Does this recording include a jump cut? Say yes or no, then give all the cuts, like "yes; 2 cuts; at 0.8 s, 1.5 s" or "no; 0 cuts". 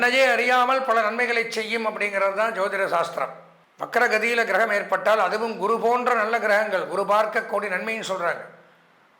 no; 0 cuts